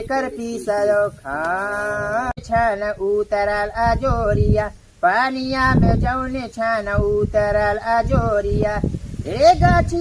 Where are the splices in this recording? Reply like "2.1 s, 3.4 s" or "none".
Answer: 2.3 s